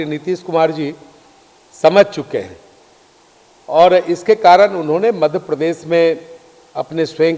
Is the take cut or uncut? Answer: uncut